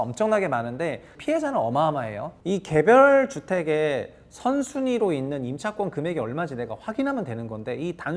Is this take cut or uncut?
cut